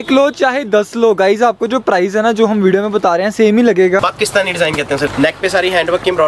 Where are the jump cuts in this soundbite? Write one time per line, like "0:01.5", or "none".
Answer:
0:04.0
0:05.1